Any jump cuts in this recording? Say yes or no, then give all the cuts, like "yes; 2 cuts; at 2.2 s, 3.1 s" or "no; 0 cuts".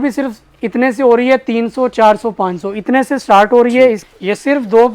yes; 1 cut; at 4.0 s